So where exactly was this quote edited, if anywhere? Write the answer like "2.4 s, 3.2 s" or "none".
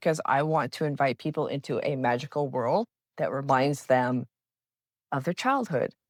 none